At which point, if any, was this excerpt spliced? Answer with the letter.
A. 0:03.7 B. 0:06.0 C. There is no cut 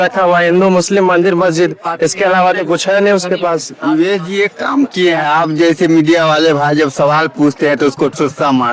A